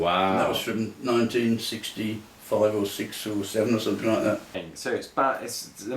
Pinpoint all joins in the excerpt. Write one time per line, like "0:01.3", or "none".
0:04.7